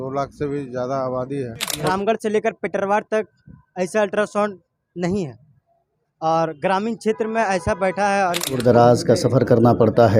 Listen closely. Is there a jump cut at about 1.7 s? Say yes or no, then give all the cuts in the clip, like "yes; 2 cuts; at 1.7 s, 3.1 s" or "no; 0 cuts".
yes; 2 cuts; at 1.7 s, 8.6 s